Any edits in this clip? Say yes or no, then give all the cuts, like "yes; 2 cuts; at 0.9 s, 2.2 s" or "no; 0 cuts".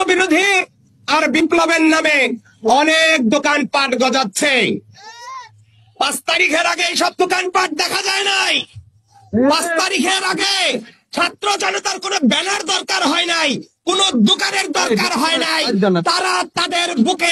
no; 0 cuts